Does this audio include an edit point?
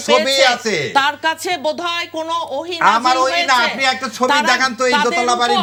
no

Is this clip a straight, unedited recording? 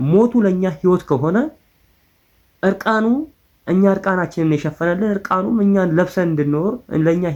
yes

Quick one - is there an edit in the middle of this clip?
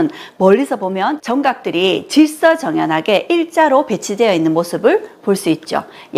yes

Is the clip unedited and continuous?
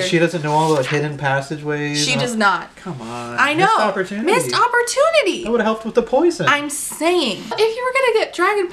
no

